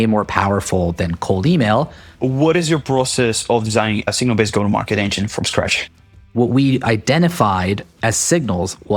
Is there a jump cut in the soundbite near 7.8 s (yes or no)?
no